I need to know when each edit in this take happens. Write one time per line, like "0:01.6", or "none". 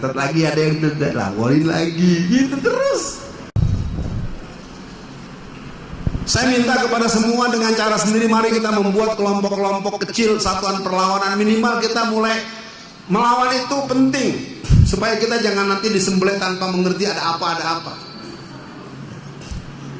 0:03.6